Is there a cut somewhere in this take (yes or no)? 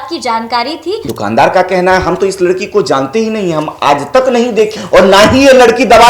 yes